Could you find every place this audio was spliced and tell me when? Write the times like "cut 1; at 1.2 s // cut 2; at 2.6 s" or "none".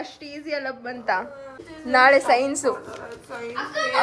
cut 1; at 1.6 s